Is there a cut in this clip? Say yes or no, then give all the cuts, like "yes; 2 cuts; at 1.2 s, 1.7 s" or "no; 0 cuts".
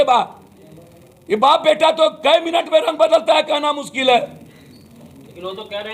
no; 0 cuts